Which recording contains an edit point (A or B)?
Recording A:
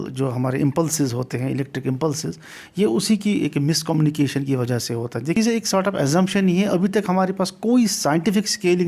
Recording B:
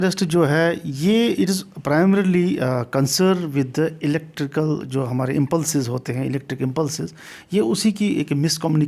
A